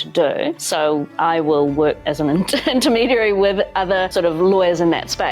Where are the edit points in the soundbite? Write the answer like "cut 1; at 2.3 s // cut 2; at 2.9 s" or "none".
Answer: cut 1; at 4.1 s